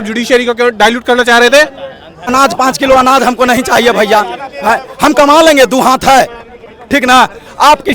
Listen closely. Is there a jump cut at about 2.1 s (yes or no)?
yes